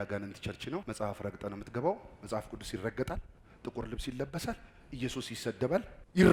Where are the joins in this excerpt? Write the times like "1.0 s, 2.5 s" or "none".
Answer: none

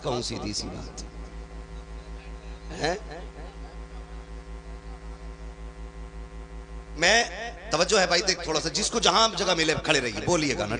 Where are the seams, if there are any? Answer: none

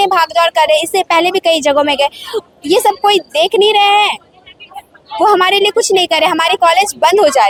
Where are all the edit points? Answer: none

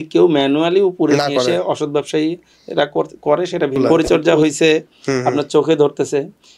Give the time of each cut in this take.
3.8 s

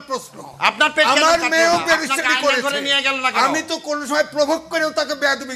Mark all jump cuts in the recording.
none

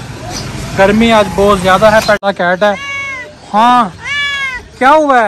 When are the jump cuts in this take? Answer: 2.2 s

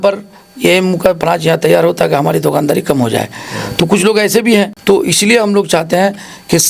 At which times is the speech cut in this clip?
4.8 s

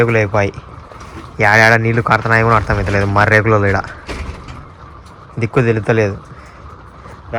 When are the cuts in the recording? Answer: none

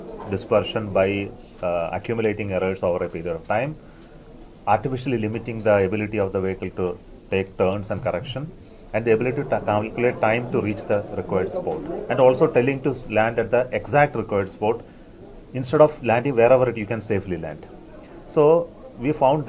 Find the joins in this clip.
none

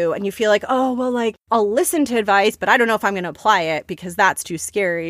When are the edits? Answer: 1.4 s

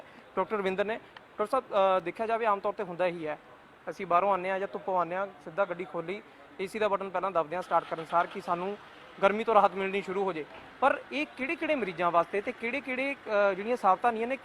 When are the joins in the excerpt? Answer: none

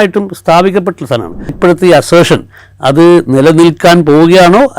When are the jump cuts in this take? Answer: 1.6 s

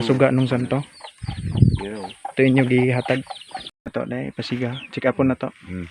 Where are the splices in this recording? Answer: 3.9 s

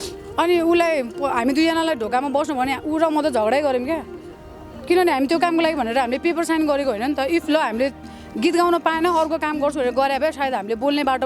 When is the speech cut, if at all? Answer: none

